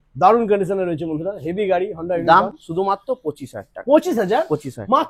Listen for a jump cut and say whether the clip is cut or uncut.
uncut